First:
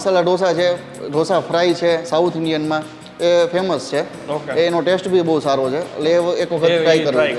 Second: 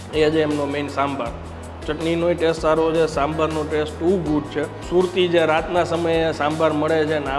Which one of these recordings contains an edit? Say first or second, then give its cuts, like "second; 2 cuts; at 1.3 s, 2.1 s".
second; 1 cut; at 4.8 s